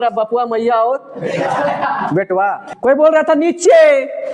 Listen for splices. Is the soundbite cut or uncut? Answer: cut